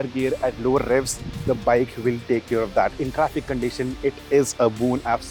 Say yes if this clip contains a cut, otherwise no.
no